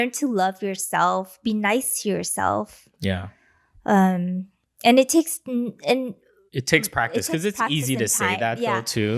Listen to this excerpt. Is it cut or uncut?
uncut